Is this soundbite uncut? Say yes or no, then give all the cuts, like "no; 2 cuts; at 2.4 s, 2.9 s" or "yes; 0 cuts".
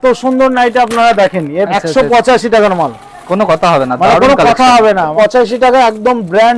no; 2 cuts; at 1.7 s, 5.1 s